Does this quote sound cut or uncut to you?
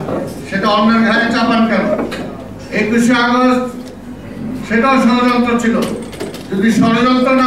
uncut